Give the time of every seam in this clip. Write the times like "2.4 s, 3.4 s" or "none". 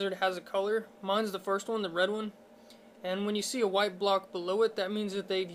none